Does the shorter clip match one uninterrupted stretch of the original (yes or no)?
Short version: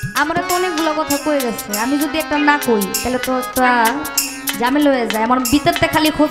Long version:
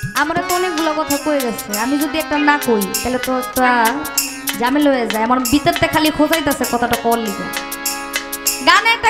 yes